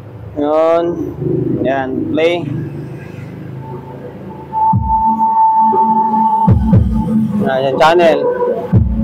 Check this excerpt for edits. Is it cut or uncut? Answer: uncut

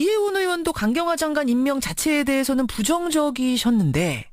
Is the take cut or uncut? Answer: cut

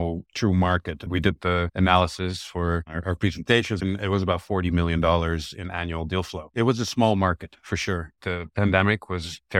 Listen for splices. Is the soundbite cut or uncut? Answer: cut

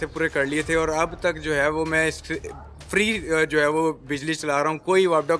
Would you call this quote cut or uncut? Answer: uncut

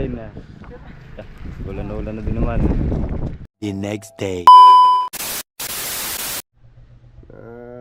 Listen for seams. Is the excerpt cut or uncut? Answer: uncut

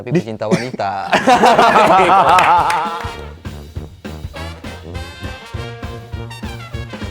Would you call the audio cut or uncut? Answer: cut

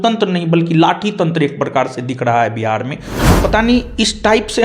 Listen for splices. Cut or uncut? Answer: cut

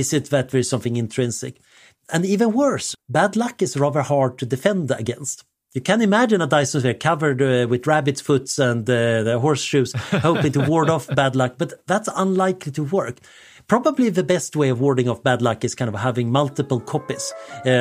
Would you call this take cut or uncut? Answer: cut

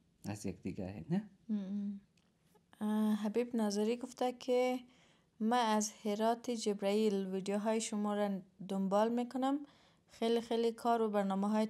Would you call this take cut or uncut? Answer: cut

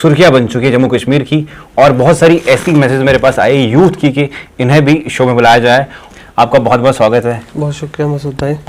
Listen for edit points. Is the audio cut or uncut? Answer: cut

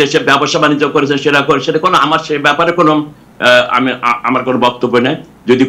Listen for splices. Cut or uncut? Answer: uncut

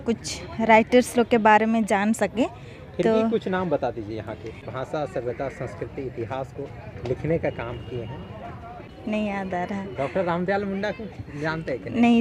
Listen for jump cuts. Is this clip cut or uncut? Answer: cut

